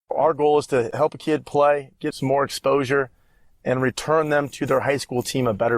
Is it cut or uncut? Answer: cut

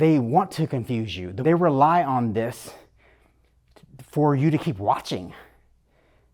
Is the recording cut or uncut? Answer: cut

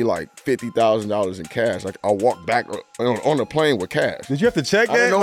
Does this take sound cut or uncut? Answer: cut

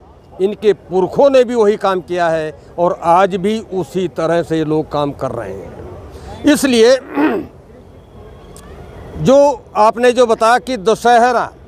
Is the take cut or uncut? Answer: uncut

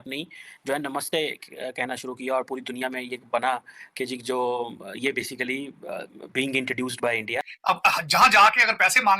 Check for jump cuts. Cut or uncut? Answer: cut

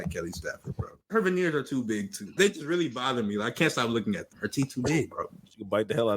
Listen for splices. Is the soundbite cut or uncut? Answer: cut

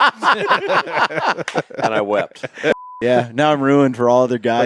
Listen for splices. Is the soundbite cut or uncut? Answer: cut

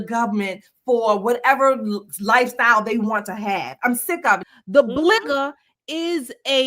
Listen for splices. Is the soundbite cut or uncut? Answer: cut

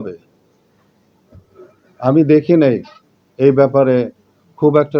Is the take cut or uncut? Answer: uncut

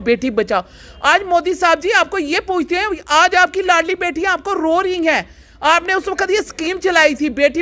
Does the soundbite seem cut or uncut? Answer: cut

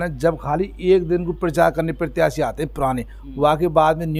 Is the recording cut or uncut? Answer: uncut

